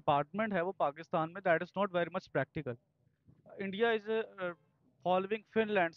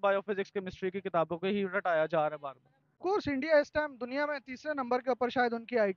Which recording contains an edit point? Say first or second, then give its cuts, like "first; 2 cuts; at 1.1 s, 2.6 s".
second; 1 cut; at 3.0 s